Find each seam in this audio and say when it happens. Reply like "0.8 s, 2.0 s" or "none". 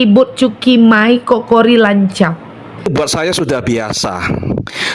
2.8 s

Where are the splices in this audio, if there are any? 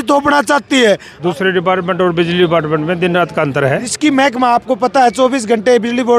1.2 s, 3.9 s

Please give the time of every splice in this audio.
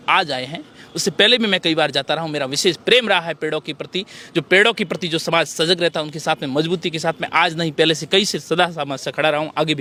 none

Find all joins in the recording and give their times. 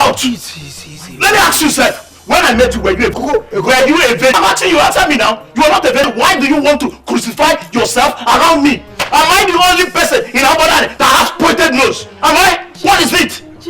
3.2 s, 4.4 s, 6.1 s

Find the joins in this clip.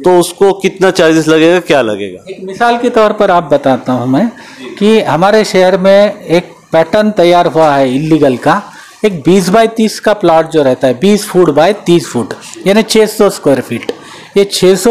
none

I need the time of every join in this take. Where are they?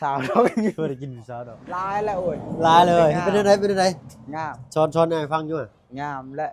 1.9 s

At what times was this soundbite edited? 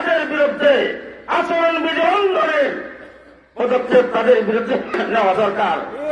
5.0 s

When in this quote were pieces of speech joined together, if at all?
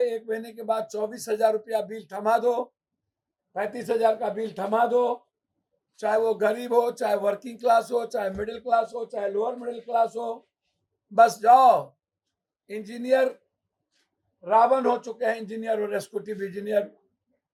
none

